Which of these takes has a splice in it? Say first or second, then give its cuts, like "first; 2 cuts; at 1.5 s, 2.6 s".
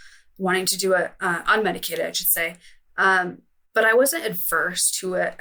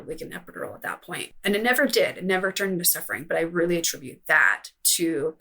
second; 1 cut; at 1.3 s